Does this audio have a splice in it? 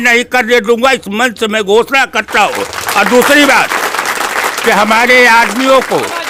no; 0 cuts

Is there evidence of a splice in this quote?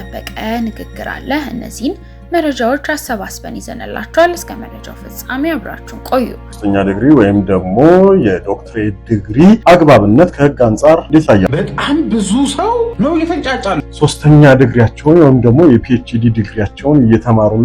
yes; 5 cuts; at 6.5 s, 9.6 s, 11.1 s, 12.9 s, 13.8 s

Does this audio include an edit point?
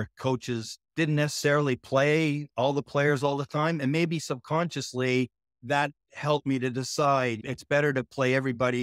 no; 0 cuts

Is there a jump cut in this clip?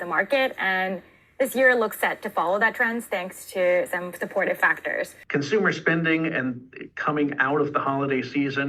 yes; 1 cut; at 5.2 s

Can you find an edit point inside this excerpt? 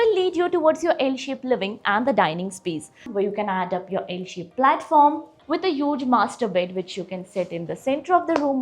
yes; 2 cuts; at 3.1 s, 5.3 s

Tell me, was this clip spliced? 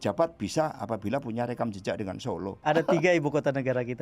yes; 1 cut; at 2.6 s

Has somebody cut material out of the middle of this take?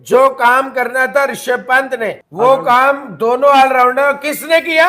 yes; 1 cut; at 2.2 s

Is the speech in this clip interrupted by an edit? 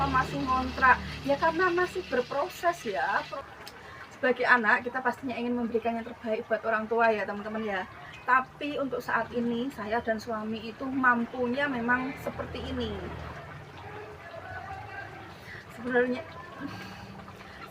yes; 2 cuts; at 3.3 s, 13.2 s

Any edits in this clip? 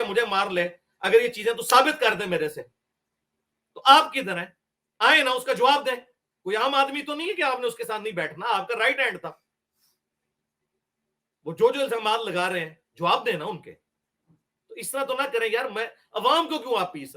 no; 0 cuts

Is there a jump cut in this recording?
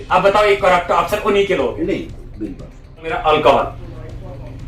yes; 1 cut; at 3.2 s

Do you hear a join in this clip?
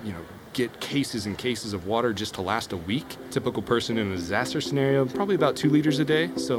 yes; 1 cut; at 3.2 s

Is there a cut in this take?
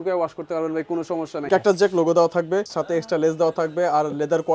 yes; 2 cuts; at 1.5 s, 2.7 s

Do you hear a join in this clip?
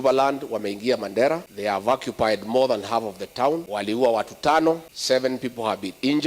yes; 3 cuts; at 1.5 s, 3.7 s, 4.9 s

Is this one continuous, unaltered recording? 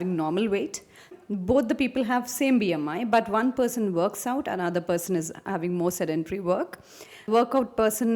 no; 2 cuts; at 1.1 s, 7.3 s

